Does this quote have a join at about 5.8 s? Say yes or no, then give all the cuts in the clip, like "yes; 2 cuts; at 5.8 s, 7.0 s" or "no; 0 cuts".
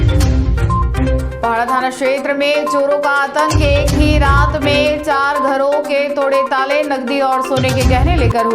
no; 1 cut; at 0.9 s